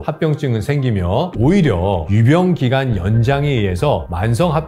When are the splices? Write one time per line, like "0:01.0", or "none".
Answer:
none